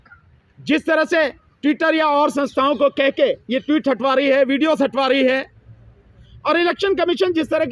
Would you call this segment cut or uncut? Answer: uncut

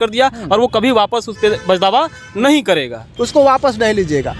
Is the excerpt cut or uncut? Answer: cut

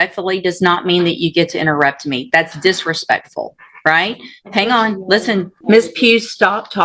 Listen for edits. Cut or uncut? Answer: cut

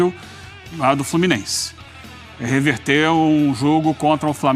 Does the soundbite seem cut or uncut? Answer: uncut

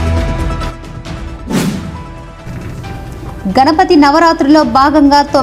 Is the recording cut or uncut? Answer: uncut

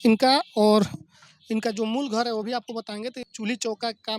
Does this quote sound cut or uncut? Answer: cut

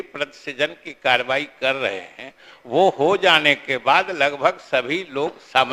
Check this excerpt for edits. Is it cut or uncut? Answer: uncut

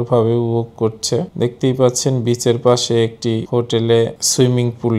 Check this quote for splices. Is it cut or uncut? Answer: uncut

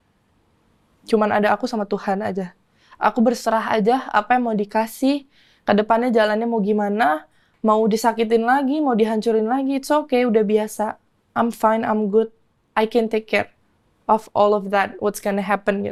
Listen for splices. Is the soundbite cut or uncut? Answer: uncut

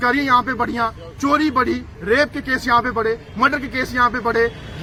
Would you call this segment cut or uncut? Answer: uncut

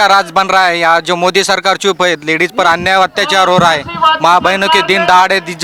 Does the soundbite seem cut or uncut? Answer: uncut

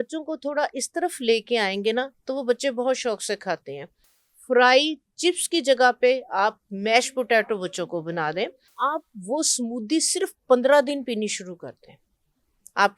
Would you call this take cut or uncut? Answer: cut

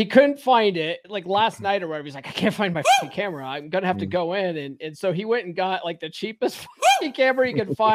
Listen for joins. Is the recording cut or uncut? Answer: cut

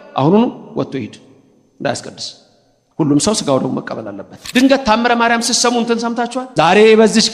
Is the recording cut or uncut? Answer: cut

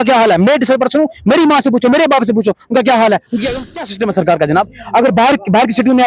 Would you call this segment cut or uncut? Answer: cut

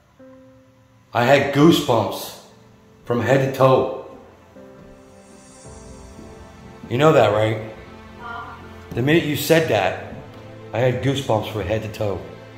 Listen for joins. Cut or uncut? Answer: uncut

